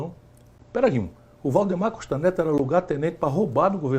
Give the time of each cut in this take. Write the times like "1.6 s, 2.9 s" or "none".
none